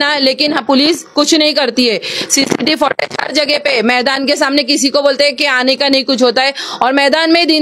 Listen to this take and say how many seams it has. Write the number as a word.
zero